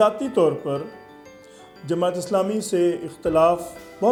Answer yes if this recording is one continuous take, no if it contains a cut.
yes